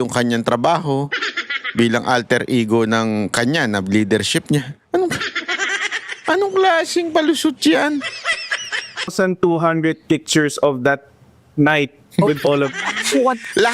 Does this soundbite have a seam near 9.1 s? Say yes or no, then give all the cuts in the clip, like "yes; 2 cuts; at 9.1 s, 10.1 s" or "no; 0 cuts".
yes; 1 cut; at 9.1 s